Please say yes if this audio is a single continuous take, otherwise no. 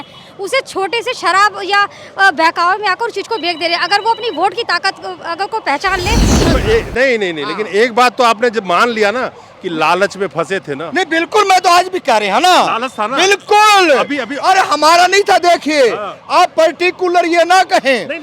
no